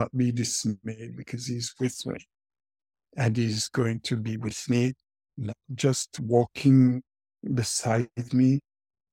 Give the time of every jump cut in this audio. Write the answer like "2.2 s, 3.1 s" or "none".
none

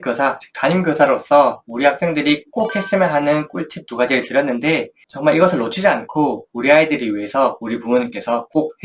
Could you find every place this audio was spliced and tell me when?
none

